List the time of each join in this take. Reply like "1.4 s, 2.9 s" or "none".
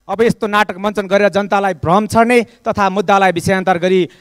none

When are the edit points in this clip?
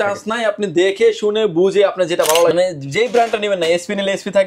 2.5 s

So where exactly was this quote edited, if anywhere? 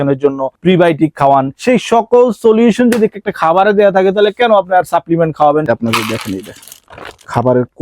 5.7 s

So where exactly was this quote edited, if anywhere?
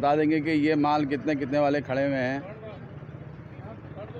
none

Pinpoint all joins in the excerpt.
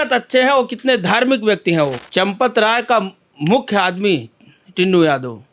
2.0 s

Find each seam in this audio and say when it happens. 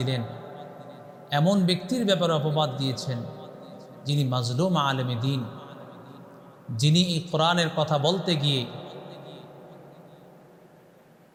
none

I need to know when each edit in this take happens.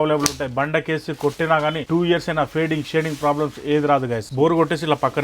1.8 s, 4.2 s

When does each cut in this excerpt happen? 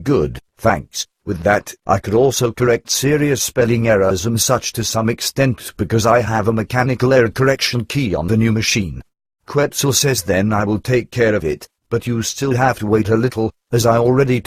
2.4 s

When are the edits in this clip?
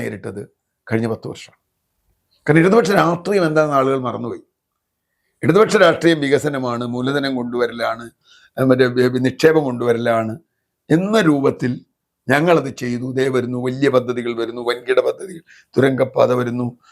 none

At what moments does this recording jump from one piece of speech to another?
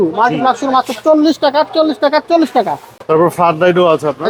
none

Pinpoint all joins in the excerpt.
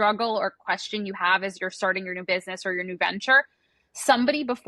none

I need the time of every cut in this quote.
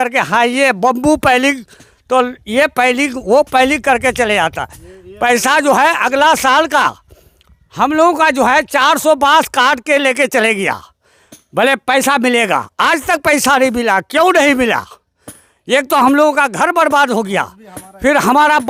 none

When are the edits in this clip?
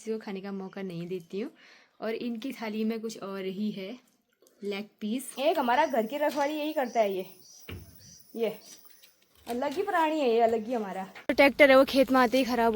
5.3 s, 11.1 s

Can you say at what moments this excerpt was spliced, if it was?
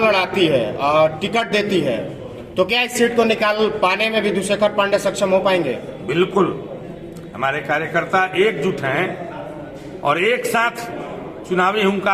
none

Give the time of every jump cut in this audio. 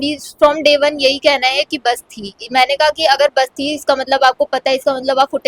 none

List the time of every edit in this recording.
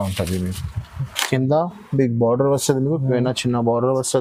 none

